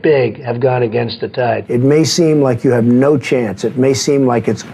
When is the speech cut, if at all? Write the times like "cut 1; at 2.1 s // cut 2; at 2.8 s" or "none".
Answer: cut 1; at 1.6 s